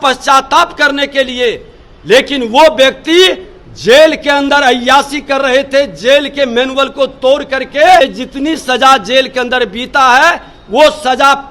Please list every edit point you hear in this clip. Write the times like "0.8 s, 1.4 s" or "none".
8.0 s